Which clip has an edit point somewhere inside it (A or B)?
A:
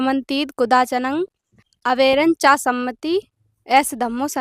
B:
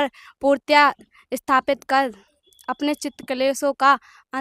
A